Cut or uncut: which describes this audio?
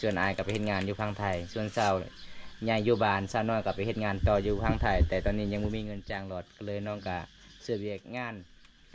uncut